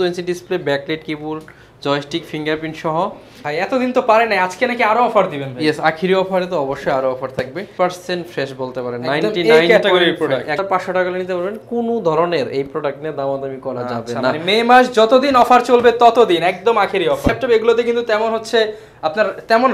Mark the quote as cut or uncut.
cut